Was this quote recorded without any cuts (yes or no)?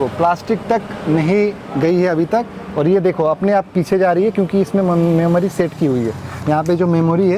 yes